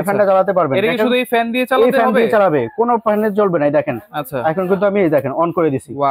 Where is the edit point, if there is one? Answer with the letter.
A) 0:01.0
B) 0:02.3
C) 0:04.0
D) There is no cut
D